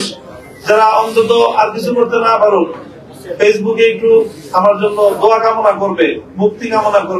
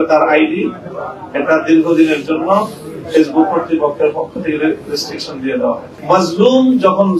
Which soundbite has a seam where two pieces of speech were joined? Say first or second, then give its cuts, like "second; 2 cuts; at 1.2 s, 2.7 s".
second; 1 cut; at 6.0 s